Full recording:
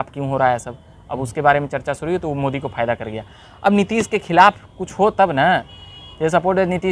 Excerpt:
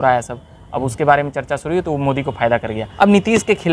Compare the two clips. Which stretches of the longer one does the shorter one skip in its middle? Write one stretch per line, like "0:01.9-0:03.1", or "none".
0:03.2-0:03.5